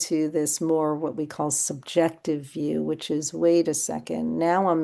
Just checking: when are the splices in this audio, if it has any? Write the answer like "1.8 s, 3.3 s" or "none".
none

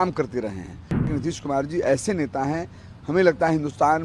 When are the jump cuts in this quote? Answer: 1.1 s

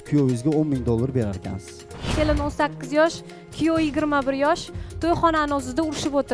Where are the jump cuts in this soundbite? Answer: 2.0 s

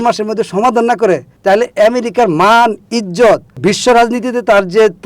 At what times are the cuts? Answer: 3.6 s

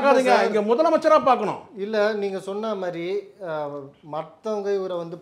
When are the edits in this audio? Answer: none

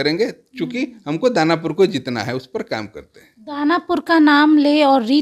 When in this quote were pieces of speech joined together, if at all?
none

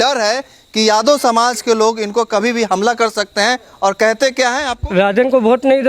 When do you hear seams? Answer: 4.8 s

